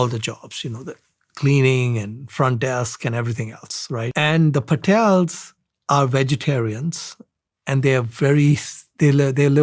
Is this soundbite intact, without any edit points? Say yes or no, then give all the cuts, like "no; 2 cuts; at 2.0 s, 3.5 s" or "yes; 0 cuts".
no; 1 cut; at 4.1 s